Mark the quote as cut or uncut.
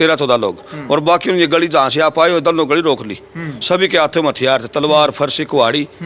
uncut